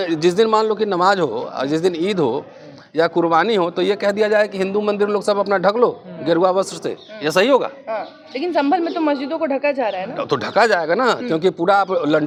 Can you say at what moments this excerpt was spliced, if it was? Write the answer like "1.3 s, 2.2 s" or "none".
none